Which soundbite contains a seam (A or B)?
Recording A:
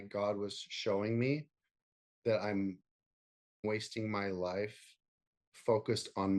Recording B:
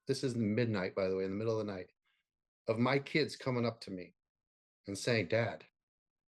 A